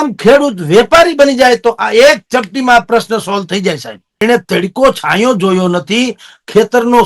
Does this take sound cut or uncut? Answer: cut